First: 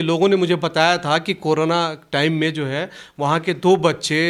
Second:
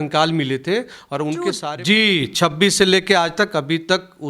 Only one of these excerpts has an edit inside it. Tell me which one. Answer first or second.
second